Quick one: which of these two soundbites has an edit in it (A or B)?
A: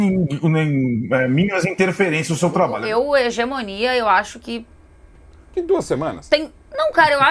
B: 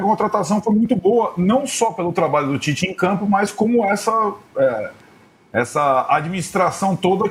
A